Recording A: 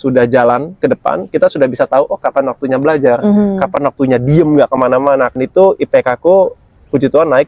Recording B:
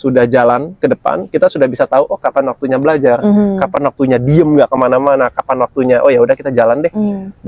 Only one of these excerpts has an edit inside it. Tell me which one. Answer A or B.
A